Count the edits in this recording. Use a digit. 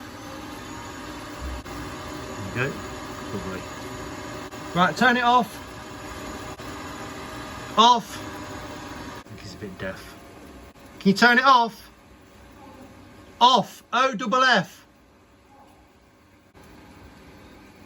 6